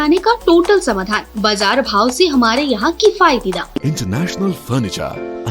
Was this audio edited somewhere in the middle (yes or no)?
yes